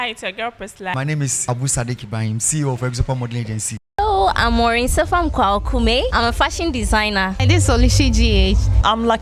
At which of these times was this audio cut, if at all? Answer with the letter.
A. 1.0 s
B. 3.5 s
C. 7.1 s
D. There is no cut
D